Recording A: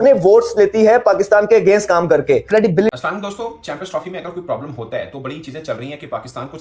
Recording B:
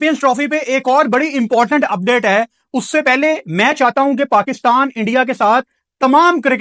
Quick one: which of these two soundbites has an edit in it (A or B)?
A